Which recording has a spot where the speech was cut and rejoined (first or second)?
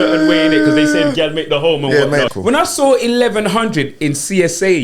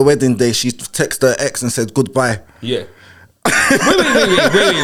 first